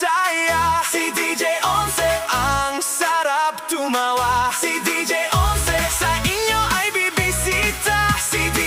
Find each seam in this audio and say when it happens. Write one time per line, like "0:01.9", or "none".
none